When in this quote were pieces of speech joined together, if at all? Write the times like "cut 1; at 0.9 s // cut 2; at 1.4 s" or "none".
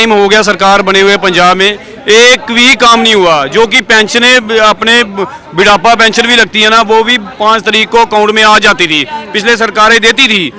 none